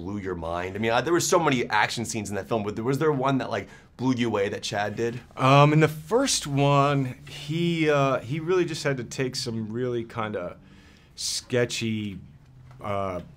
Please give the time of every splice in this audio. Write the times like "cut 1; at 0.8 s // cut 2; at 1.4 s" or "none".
cut 1; at 7.0 s